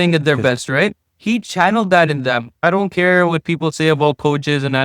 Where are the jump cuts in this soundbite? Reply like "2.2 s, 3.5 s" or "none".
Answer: 2.5 s